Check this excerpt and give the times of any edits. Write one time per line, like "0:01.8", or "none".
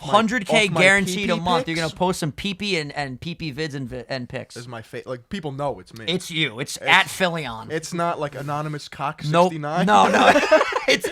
none